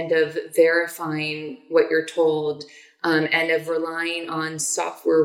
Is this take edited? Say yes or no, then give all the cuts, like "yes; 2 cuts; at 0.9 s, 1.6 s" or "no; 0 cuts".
no; 0 cuts